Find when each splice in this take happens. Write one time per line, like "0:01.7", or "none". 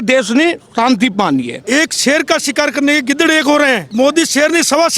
0:01.6
0:03.9